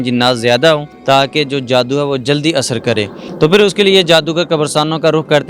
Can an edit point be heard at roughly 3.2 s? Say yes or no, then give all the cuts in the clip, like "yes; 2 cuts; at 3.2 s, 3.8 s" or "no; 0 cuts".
yes; 2 cuts; at 0.9 s, 3.2 s